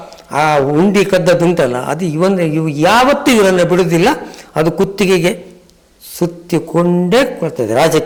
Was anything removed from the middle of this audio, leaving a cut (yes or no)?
no